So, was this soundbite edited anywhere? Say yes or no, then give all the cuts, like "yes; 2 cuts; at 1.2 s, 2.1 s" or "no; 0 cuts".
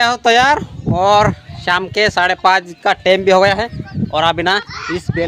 no; 0 cuts